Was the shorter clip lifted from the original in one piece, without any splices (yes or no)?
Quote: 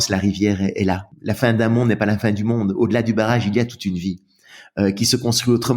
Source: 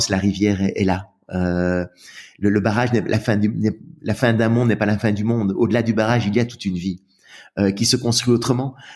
no